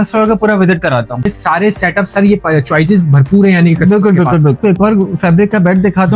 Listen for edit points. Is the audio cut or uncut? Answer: cut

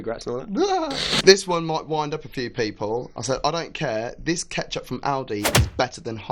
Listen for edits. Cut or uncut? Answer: cut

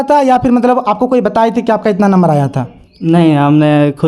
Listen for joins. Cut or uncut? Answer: uncut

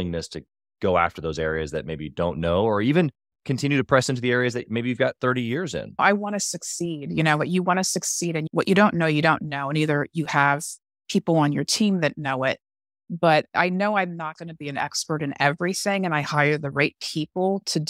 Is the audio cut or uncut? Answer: cut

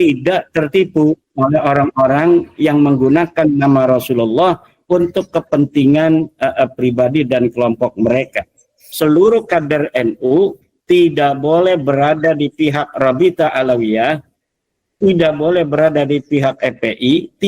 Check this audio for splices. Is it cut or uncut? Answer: cut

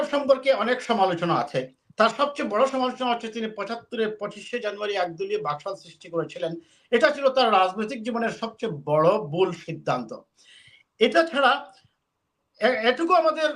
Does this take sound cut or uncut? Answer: uncut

